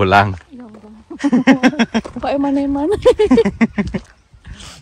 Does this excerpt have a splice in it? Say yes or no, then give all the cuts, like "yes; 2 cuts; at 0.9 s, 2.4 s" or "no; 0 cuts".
no; 0 cuts